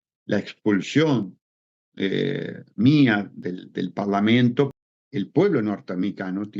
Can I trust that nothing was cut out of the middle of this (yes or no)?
no